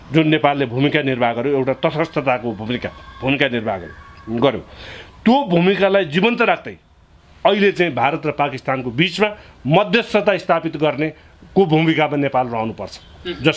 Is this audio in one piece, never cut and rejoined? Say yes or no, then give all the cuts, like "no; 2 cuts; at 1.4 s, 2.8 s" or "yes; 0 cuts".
yes; 0 cuts